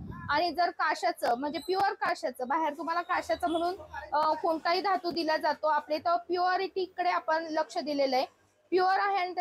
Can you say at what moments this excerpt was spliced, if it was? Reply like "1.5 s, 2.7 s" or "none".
none